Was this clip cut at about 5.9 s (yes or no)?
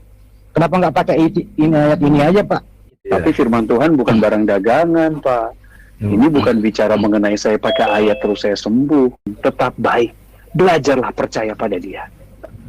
no